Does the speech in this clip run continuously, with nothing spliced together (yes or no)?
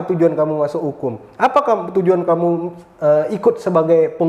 yes